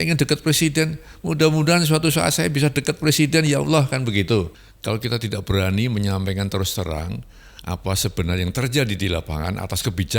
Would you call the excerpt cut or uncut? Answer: cut